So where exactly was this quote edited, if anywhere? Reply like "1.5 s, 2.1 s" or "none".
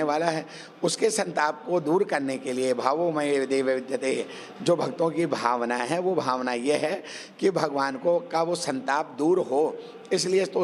none

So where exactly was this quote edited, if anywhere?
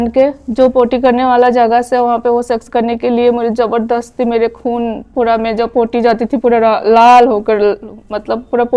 none

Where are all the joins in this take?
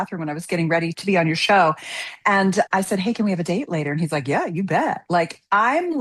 none

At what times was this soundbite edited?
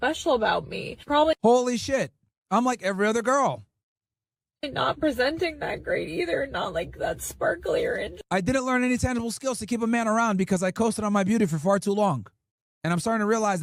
none

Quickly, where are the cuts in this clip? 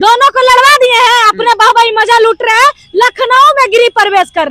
none

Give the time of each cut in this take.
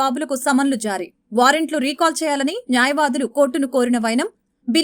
none

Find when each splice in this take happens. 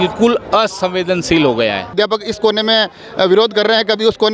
1.9 s

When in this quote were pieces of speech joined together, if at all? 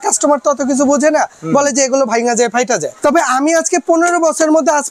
2.9 s

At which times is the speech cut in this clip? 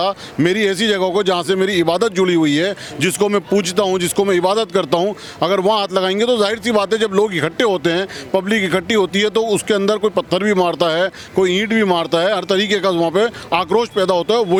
none

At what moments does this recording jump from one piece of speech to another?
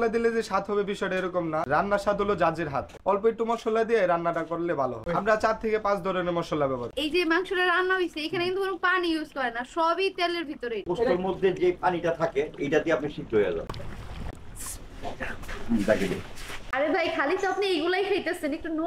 6.9 s, 10.8 s, 14.3 s, 16.6 s

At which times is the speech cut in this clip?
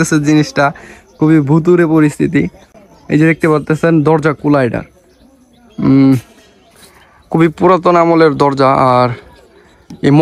none

